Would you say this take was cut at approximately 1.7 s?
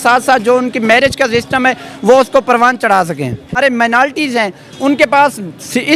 no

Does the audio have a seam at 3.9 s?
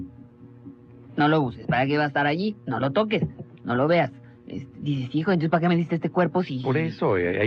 yes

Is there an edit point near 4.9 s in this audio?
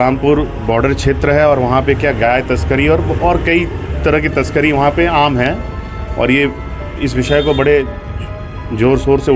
no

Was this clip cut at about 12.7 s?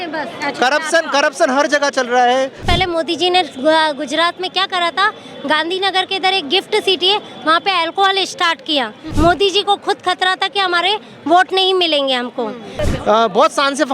yes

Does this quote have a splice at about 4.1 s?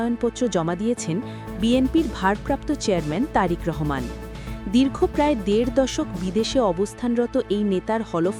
no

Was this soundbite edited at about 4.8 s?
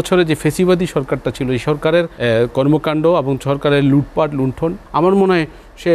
yes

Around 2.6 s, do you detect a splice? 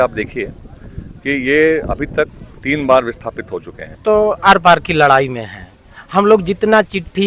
no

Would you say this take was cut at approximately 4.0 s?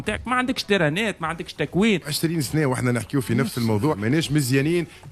yes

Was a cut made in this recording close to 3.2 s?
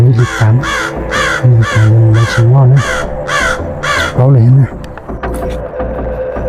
no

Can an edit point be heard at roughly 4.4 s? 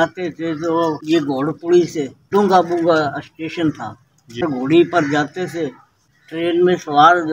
yes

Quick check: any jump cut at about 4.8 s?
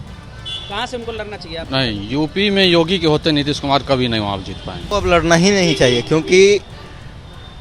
yes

